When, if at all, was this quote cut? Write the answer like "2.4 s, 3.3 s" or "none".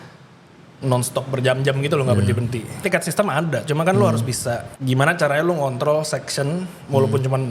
2.8 s, 4.7 s